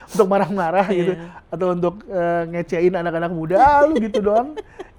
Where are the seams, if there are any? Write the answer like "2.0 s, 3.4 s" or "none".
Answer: none